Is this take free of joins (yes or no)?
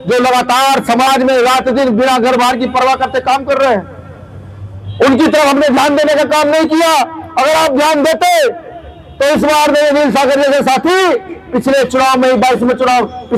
yes